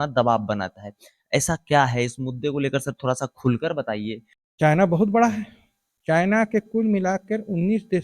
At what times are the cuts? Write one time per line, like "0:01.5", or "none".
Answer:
0:04.3